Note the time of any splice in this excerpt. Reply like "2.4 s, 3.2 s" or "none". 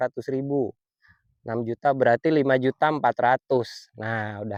none